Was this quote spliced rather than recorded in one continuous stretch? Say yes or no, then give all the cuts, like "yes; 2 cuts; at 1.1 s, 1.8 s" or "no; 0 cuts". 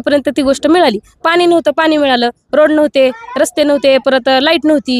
no; 0 cuts